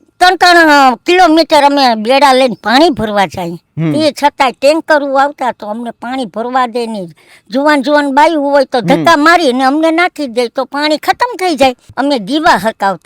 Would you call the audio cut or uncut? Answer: cut